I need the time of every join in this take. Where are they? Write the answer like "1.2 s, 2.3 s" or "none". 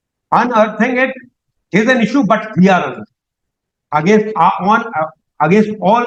none